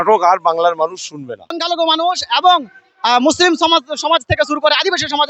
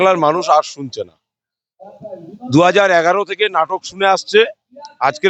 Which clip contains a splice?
first; 1 cut; at 1.6 s

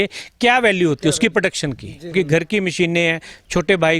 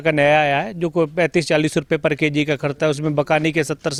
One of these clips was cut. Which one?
first; 1 cut; at 2.1 s

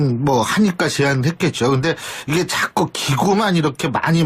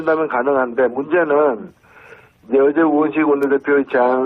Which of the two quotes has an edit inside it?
first; 1 cut; at 2.7 s

